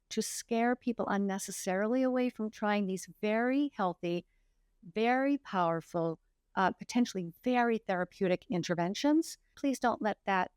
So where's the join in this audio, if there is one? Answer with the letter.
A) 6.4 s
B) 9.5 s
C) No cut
B